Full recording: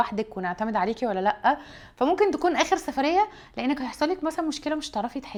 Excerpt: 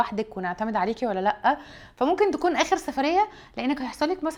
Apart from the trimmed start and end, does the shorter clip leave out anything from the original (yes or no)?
no